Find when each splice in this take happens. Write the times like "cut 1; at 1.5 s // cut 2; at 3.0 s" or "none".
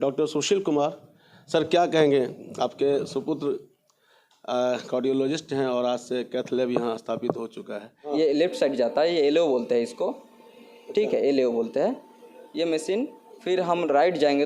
cut 1; at 8.0 s